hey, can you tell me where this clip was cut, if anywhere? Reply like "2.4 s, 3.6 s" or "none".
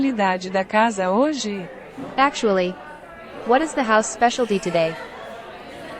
4.9 s

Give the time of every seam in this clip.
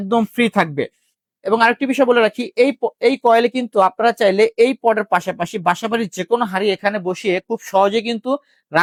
none

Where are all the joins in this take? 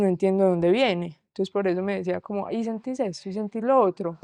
1.2 s

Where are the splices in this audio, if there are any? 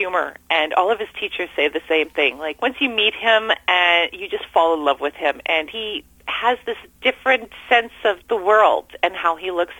2.5 s, 5.7 s, 6.9 s, 8.2 s

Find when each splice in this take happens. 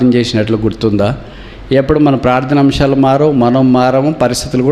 none

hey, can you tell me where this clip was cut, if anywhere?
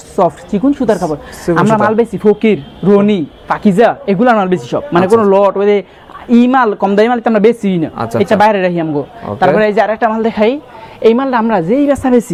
none

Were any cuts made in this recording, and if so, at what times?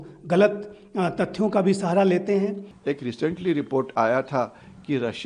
2.7 s

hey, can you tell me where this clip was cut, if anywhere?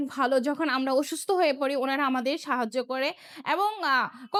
none

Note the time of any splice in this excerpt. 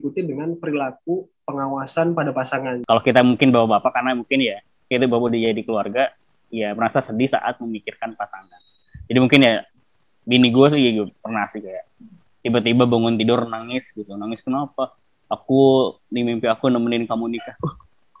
2.8 s

